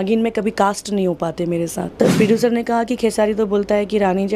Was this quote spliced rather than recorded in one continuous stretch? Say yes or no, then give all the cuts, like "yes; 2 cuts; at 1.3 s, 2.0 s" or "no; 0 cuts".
yes; 1 cut; at 1.9 s